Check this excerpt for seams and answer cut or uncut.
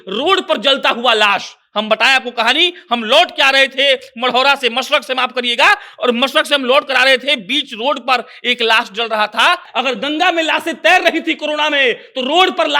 cut